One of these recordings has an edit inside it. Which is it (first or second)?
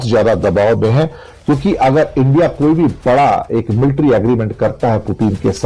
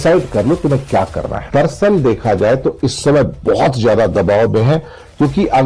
second